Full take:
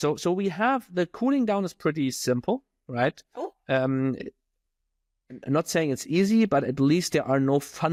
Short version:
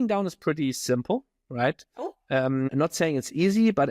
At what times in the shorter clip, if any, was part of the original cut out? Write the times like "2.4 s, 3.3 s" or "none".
2.7 s